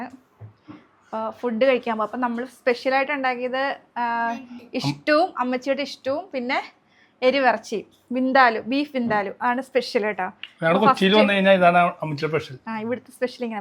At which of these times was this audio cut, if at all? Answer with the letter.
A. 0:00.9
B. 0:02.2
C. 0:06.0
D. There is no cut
D